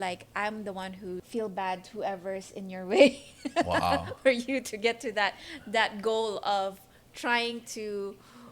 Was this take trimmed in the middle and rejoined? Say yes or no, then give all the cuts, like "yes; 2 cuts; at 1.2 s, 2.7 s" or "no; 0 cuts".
yes; 1 cut; at 1.2 s